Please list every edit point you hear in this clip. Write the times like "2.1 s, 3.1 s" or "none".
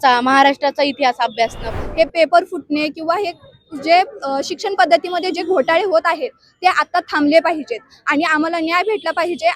1.7 s

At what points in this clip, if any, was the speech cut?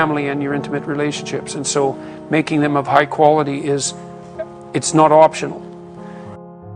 5.5 s

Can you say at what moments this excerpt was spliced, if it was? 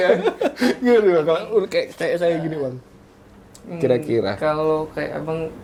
none

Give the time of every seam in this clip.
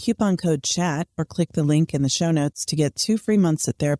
none

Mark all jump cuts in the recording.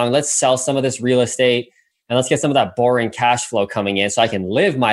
none

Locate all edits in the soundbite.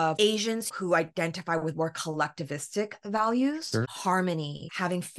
none

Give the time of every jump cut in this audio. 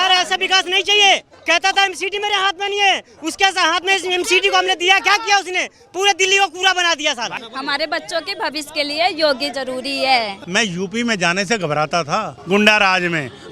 1.3 s, 7.4 s, 10.4 s, 12.3 s

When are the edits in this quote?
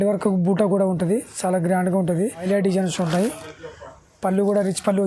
2.4 s

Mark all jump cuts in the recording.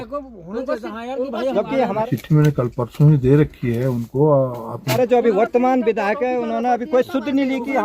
2.0 s, 4.9 s

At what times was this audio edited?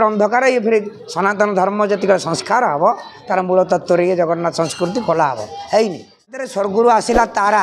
6.5 s

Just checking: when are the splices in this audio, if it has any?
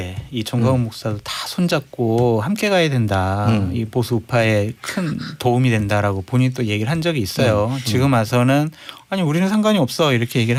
none

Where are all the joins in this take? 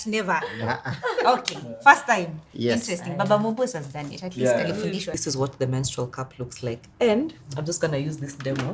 5.1 s

